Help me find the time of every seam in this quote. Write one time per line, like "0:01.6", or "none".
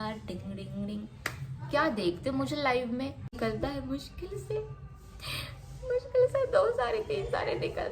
0:03.3